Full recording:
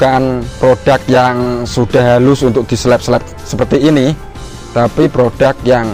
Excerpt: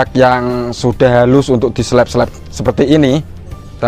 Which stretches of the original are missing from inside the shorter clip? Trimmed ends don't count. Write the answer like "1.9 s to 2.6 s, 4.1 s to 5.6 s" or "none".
none